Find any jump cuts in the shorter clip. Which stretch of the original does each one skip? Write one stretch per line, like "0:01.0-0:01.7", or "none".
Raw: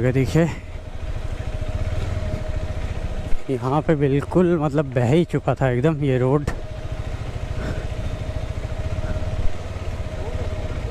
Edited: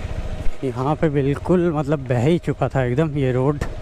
none